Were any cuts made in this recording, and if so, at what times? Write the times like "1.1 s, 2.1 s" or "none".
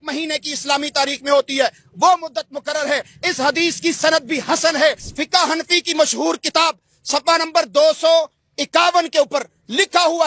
5.1 s